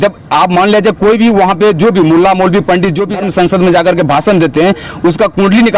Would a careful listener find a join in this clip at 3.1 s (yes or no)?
yes